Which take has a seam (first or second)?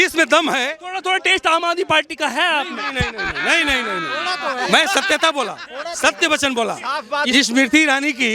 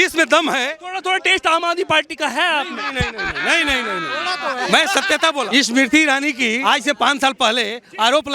second